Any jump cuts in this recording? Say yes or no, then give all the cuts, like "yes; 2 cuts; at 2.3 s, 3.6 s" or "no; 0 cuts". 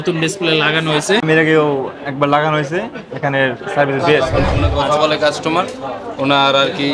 yes; 2 cuts; at 1.2 s, 4.2 s